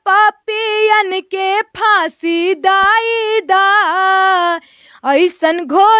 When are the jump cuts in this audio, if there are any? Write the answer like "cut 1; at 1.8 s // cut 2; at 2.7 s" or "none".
none